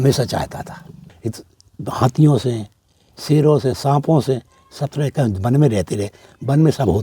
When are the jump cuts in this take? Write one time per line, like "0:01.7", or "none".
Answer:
0:01.1